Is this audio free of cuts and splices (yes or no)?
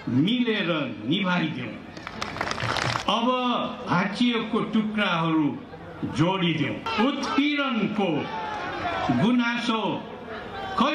no